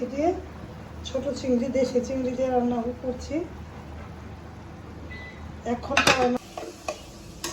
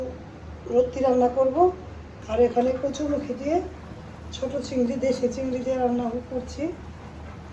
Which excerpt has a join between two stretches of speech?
first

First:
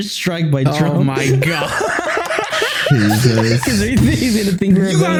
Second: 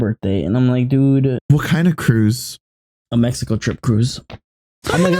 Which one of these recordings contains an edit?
second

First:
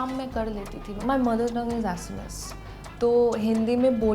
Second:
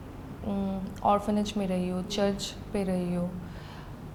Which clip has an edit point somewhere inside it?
first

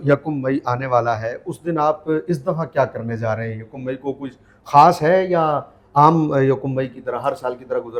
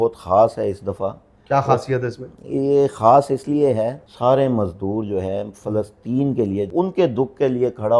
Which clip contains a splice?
second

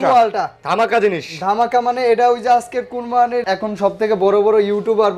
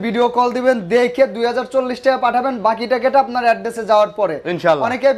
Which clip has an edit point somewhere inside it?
first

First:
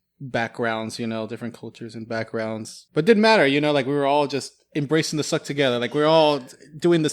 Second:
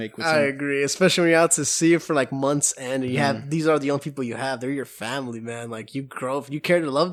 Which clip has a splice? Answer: first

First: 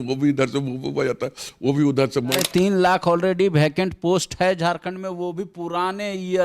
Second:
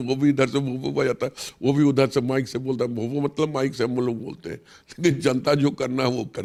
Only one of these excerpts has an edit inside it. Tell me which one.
first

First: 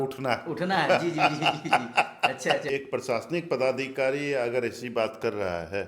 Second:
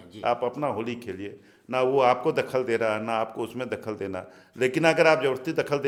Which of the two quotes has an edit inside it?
first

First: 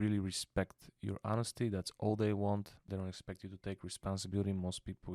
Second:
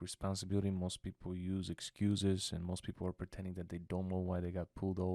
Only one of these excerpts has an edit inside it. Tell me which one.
first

